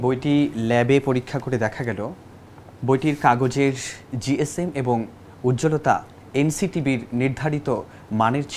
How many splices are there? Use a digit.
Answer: 0